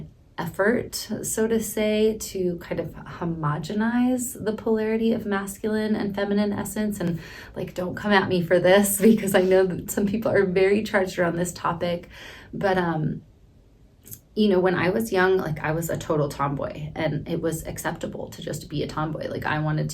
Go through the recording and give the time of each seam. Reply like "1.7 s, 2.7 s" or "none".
none